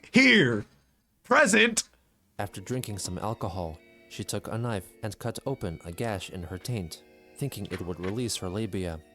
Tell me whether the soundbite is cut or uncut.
cut